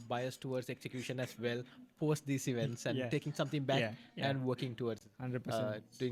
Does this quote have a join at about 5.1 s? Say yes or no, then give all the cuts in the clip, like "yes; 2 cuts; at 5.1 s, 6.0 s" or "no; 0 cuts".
no; 0 cuts